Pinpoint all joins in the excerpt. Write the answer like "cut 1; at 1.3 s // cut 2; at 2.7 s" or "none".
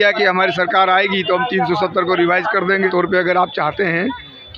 cut 1; at 2.9 s

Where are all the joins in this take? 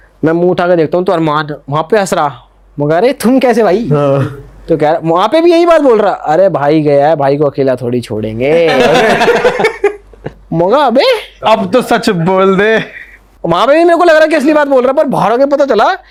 none

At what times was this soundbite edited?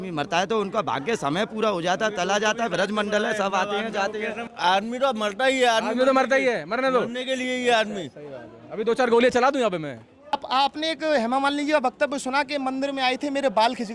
cut 1; at 4.5 s // cut 2; at 10.3 s

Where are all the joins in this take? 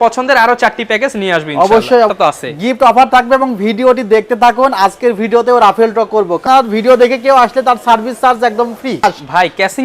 cut 1; at 2.1 s // cut 2; at 6.4 s // cut 3; at 9.0 s

